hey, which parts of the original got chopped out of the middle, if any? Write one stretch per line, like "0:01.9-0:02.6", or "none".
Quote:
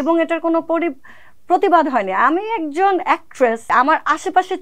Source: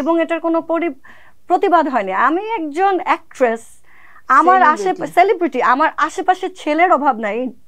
0:03.7-0:05.6